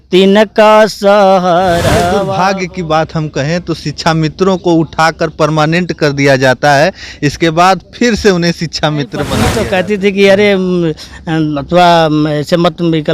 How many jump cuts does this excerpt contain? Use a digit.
2